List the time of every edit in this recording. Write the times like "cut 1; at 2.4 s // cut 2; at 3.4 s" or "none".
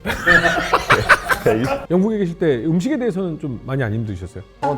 cut 1; at 1.8 s